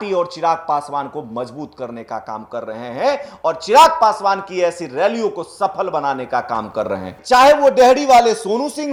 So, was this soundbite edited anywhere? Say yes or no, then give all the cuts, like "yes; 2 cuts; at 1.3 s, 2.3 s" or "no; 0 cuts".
no; 0 cuts